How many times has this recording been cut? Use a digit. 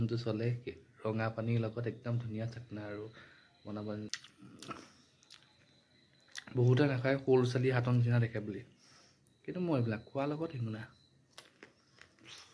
1